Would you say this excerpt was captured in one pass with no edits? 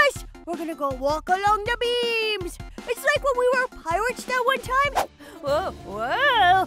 no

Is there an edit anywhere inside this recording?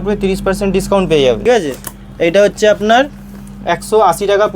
yes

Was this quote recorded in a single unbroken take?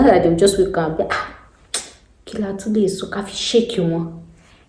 yes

